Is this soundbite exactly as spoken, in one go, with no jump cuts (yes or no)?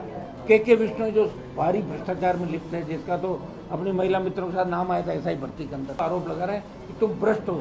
no